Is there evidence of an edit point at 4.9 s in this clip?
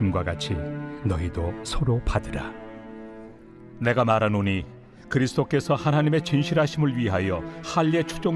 no; 1 cut; at 3.0 s

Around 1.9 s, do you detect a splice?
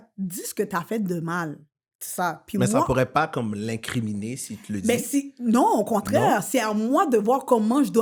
no; 0 cuts

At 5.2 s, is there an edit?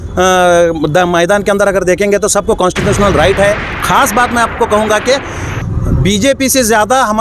no; 1 cut; at 3.7 s

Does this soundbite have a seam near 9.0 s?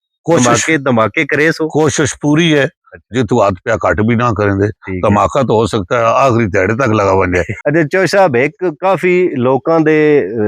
no; 1 cut; at 7.5 s

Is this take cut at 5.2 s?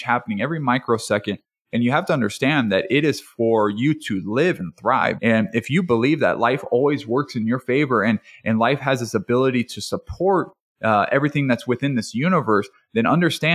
yes; 1 cut; at 5.2 s

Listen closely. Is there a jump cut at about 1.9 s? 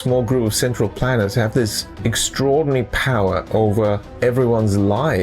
yes; 2 cuts; at 1.9 s, 4.1 s

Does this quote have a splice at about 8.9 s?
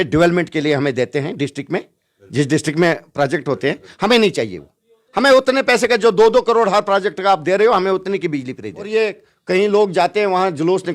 yes; 1 cut; at 8.9 s

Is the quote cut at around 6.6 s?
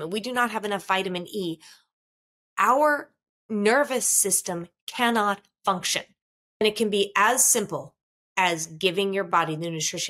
yes; 1 cut; at 6.6 s

